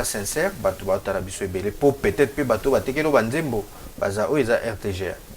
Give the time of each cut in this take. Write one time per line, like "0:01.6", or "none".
none